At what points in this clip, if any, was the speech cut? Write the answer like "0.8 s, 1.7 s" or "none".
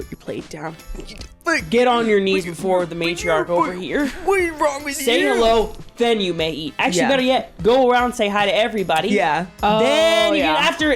none